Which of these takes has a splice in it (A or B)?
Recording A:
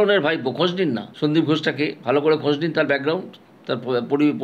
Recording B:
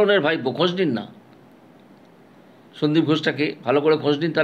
A